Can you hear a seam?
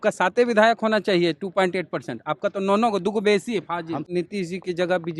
yes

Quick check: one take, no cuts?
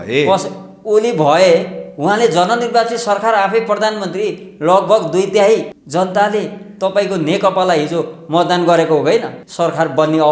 no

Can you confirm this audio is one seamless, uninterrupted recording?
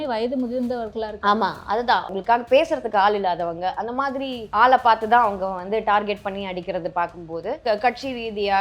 no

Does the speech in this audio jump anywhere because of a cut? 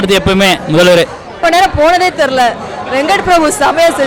yes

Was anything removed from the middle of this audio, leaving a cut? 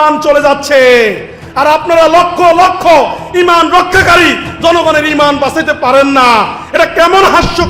no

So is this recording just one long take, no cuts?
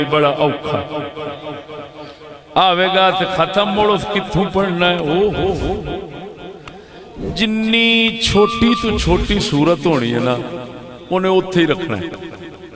yes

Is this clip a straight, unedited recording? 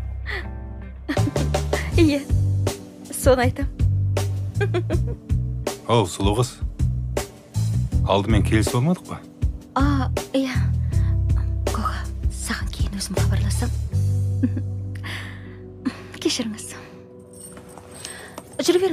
yes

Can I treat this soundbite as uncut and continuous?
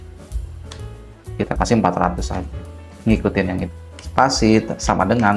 no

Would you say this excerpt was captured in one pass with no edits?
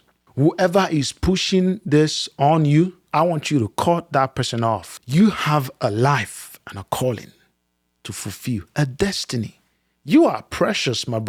yes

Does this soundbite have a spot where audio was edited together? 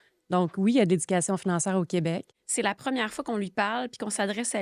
yes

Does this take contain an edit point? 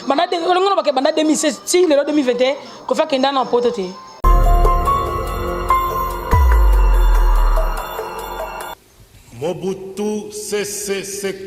yes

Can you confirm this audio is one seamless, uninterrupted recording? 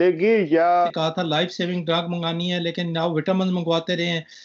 no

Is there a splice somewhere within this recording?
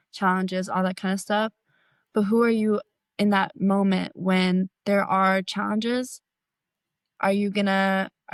no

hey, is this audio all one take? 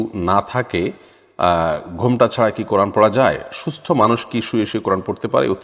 yes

